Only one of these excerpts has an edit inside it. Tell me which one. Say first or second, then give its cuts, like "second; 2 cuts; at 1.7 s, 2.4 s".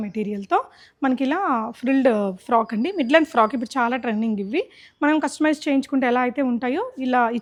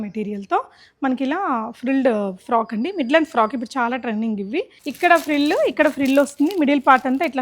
second; 1 cut; at 4.8 s